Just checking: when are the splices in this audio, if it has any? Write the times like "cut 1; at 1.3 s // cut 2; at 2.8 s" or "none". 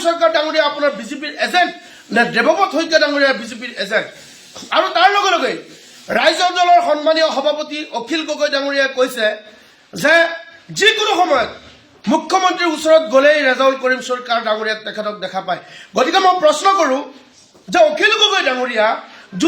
none